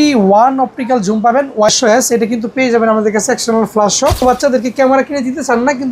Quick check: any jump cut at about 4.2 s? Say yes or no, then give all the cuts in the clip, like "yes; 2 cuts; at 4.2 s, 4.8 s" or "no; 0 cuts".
yes; 2 cuts; at 1.7 s, 4.2 s